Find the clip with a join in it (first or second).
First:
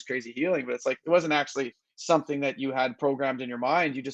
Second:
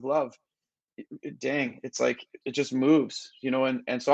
second